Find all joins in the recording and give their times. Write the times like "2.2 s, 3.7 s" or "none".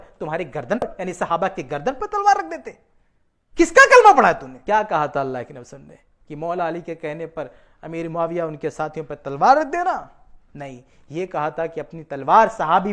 0.8 s, 4.5 s